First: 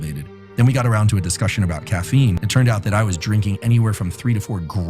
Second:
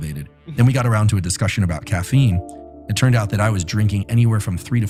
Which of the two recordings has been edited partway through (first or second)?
first